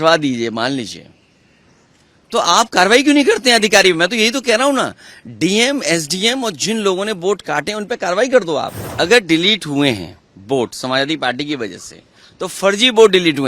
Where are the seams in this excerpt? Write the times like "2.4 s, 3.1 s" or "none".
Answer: 8.8 s